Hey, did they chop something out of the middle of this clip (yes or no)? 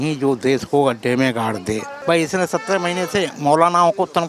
yes